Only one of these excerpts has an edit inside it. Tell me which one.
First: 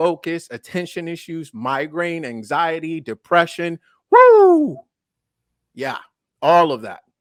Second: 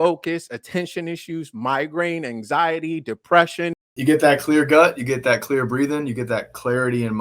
second; 1 cut; at 3.9 s

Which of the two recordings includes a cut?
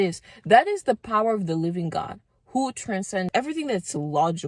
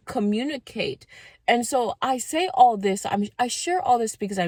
first; 1 cut; at 3.3 s

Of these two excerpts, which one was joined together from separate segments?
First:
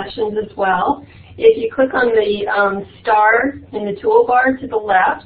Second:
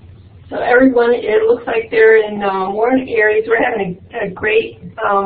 second; 1 cut; at 2.8 s

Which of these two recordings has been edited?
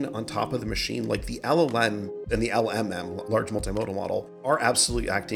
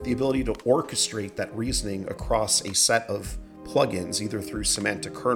first; 3 cuts; at 2.2 s, 3.2 s, 4.4 s

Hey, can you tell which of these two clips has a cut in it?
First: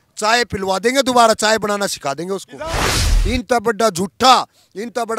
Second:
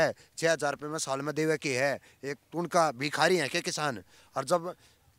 first; 1 cut; at 2.8 s

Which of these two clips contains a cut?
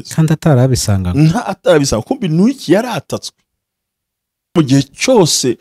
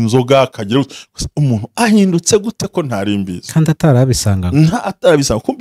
first; 1 cut; at 4.6 s

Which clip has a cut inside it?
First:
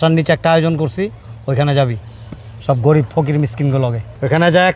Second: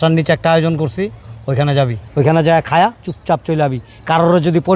second; 1 cut; at 2.0 s

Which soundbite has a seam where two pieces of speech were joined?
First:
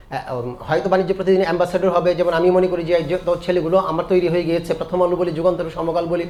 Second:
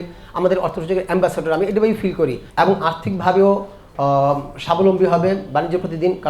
second; 1 cut; at 2.4 s

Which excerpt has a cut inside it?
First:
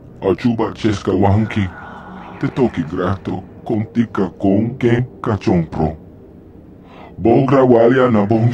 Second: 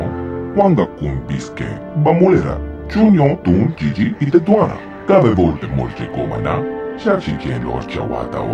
second; 1 cut; at 6.7 s

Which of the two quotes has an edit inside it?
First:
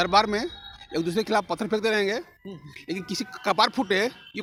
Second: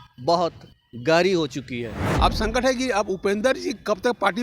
second; 1 cut; at 2.0 s

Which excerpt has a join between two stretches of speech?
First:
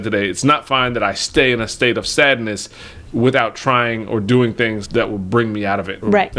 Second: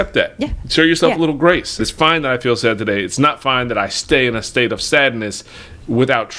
second; 1 cut; at 1.8 s

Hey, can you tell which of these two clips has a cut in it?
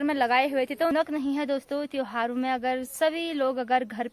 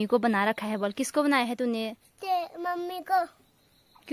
first; 1 cut; at 0.9 s

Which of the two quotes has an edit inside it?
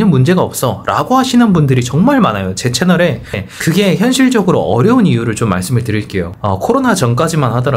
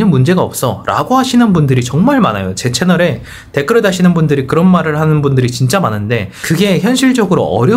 first; 2 cuts; at 3.4 s, 6.3 s

